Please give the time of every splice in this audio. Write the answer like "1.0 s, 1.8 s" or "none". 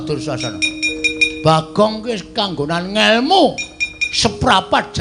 none